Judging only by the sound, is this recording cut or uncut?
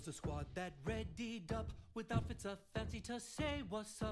uncut